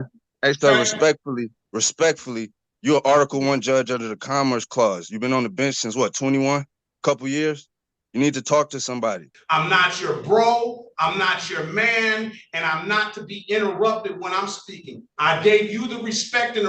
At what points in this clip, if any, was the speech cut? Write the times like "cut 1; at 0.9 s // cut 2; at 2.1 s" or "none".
cut 1; at 9.3 s